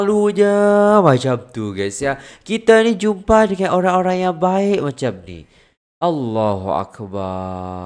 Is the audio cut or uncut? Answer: uncut